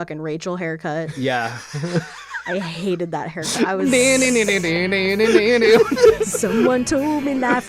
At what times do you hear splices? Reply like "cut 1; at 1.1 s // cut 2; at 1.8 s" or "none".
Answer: cut 1; at 6.2 s